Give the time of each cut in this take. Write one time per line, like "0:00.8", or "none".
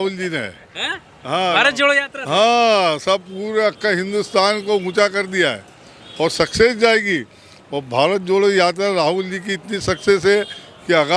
none